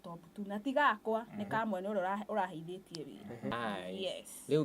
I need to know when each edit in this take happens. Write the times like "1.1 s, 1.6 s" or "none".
3.5 s

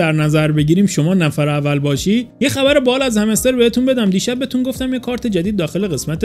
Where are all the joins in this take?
2.3 s

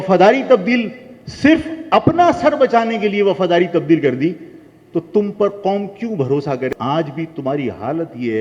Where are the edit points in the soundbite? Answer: 6.7 s

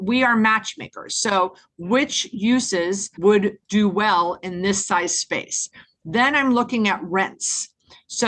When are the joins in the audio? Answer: 3.4 s

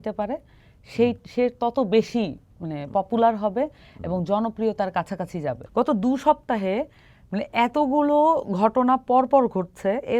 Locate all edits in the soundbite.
5.6 s

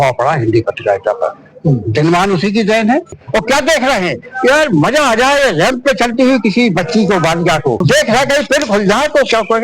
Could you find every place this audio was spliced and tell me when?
3.1 s, 7.8 s

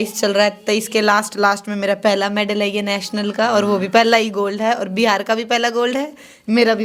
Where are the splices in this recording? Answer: none

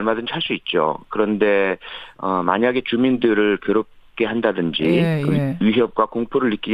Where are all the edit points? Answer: 2.7 s

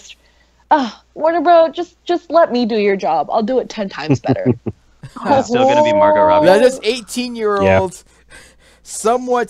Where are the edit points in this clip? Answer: none

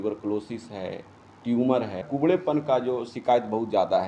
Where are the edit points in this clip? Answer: 2.0 s

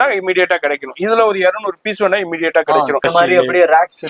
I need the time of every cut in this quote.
3.0 s

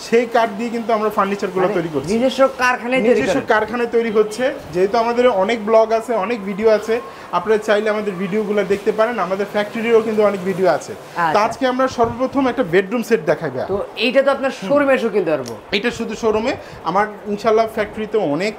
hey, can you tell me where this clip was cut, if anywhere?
none

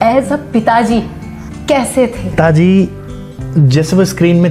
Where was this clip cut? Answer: 2.3 s

